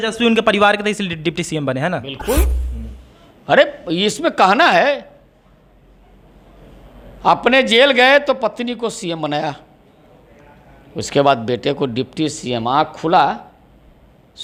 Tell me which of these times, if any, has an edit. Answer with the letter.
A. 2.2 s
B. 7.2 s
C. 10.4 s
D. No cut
D